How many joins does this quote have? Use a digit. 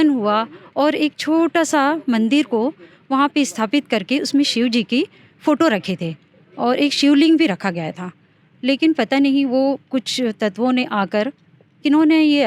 0